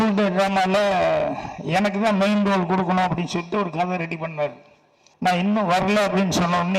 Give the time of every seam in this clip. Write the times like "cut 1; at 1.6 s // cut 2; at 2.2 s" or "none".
cut 1; at 5.4 s